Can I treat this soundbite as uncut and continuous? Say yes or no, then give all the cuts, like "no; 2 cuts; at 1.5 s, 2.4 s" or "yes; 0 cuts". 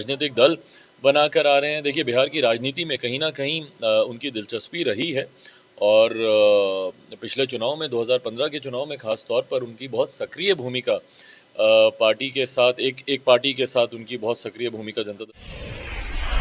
no; 1 cut; at 15.2 s